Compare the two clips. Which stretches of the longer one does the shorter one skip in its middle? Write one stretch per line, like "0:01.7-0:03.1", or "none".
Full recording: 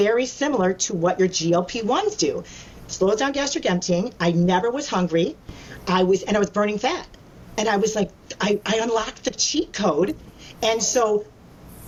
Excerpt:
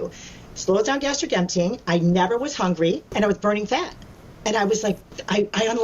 0:05.4-0:06.2